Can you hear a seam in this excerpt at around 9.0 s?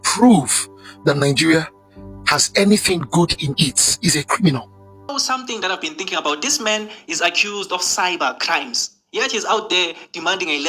no; 1 cut; at 4.9 s

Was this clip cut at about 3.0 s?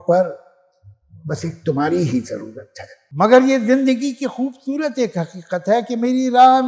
yes; 1 cut; at 3.0 s

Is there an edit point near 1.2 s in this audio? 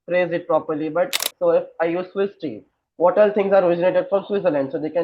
yes; 1 cut; at 1.2 s

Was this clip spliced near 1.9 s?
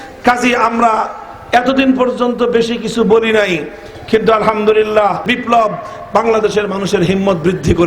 no; 1 cut; at 5.3 s

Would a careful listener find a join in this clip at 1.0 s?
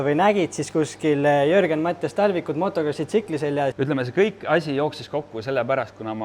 no; 1 cut; at 3.7 s

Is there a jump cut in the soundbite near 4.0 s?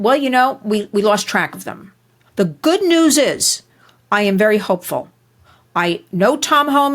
no; 1 cut; at 2.2 s

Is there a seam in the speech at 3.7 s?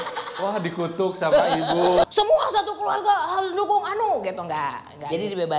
no; 1 cut; at 2.0 s

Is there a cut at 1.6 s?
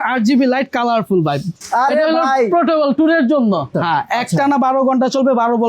yes; 2 cuts; at 1.6 s, 3.7 s

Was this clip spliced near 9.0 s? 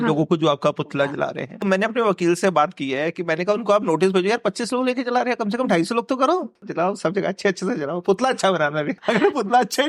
yes; 3 cuts; at 1.6 s, 6.7 s, 9.0 s

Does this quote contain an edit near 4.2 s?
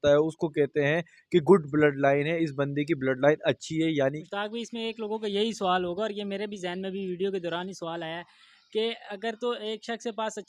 yes; 1 cut; at 4.2 s

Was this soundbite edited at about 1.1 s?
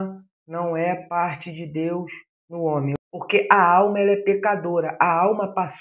no; 1 cut; at 2.9 s

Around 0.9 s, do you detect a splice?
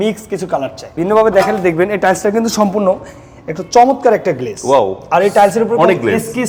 yes; 1 cut; at 0.9 s

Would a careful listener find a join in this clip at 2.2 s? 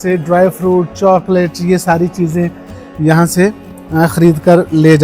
no; 0 cuts

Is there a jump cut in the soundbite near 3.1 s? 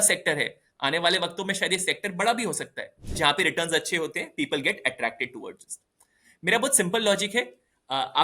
yes; 1 cut; at 3.1 s

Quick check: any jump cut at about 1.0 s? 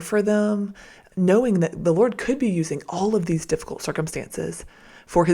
yes; 1 cut; at 1.0 s

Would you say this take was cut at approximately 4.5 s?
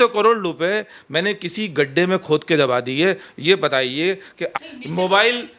yes; 1 cut; at 4.5 s

